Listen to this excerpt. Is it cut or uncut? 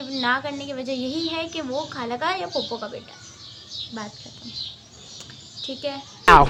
uncut